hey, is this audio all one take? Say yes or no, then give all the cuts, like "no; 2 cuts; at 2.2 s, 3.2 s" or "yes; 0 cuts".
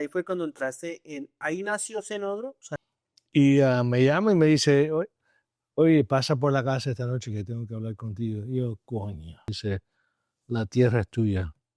no; 2 cuts; at 2.8 s, 9.5 s